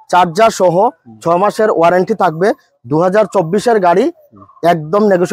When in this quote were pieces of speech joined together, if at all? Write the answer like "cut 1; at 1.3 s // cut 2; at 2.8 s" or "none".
none